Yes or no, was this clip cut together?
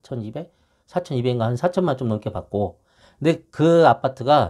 no